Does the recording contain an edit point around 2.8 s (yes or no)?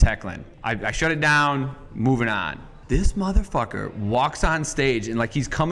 yes